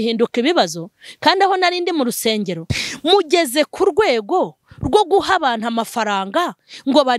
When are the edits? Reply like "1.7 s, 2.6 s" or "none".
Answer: 2.7 s